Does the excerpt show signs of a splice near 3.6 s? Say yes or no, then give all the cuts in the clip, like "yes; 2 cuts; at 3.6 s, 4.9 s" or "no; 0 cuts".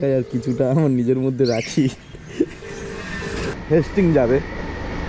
yes; 1 cut; at 3.6 s